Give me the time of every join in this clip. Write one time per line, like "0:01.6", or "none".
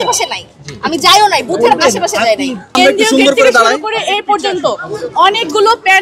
0:02.8